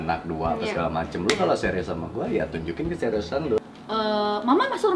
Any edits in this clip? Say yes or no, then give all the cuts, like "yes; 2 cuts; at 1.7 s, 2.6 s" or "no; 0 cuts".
yes; 1 cut; at 3.6 s